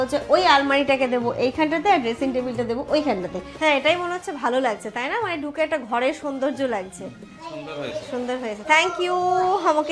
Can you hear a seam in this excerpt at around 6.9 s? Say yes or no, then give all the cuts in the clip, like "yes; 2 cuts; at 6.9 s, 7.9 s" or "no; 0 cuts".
no; 1 cut; at 3.5 s